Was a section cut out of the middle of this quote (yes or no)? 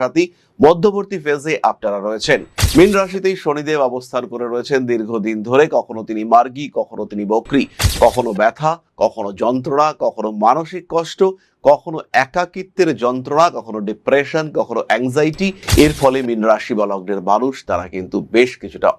no